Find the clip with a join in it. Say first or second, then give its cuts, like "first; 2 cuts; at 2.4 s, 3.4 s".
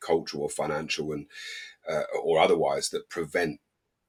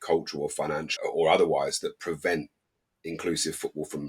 second; 1 cut; at 1.0 s